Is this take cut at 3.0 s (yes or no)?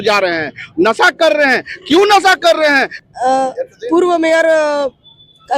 yes